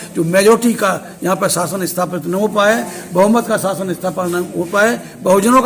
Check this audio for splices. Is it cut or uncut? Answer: uncut